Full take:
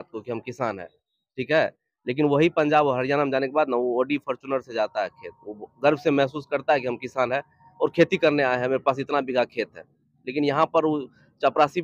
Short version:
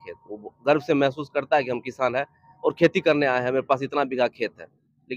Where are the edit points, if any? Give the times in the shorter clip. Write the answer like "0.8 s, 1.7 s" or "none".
none